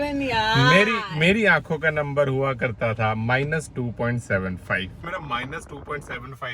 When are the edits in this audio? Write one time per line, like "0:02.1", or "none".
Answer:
0:05.1